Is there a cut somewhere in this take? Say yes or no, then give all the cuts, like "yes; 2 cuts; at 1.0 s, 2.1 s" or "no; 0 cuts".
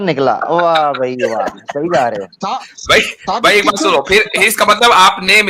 no; 0 cuts